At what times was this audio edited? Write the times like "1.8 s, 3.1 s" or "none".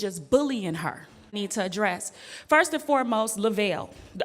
1.3 s